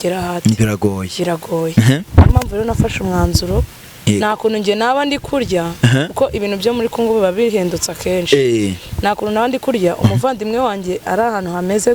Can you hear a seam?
no; 0 cuts

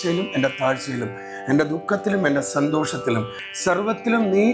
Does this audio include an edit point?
yes; 1 cut; at 3.4 s

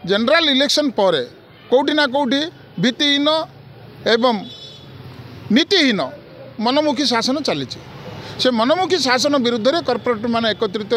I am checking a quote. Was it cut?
no; 0 cuts

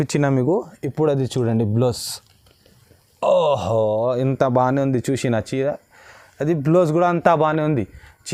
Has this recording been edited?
no; 0 cuts

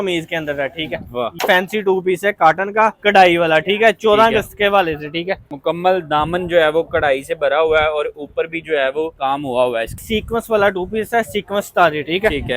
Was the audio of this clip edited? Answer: yes; 4 cuts; at 1.4 s, 5.5 s, 9.1 s, 10.0 s

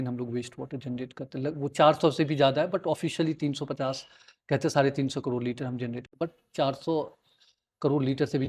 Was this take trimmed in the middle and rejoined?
no; 0 cuts

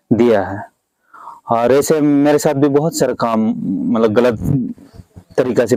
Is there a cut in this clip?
no; 0 cuts

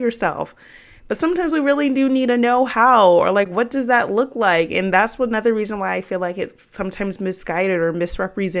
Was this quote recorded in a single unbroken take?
yes; 0 cuts

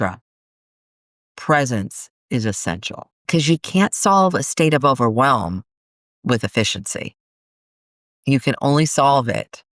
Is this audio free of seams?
no; 1 cut; at 3.3 s

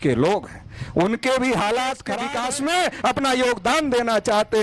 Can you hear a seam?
yes; 1 cut; at 2.1 s

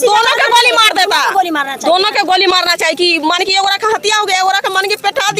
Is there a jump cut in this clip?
no; 0 cuts

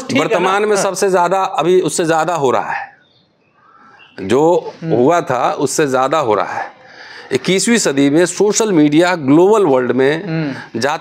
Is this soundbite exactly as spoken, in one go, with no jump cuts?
yes; 0 cuts

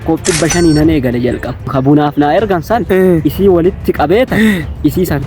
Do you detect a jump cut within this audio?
yes; 1 cut; at 1.7 s

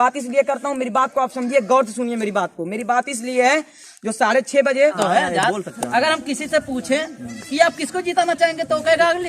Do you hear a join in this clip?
yes; 1 cut; at 5.0 s

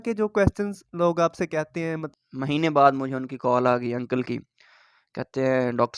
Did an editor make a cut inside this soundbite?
yes; 1 cut; at 2.1 s

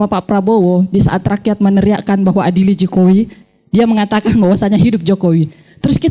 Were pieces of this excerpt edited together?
no; 0 cuts

